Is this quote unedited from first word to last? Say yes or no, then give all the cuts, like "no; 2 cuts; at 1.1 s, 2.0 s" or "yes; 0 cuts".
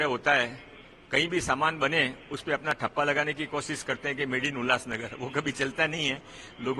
yes; 0 cuts